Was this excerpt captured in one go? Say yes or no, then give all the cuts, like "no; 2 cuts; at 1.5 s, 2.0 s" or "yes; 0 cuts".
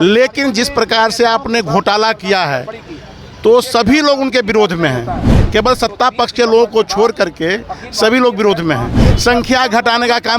no; 1 cut; at 9.0 s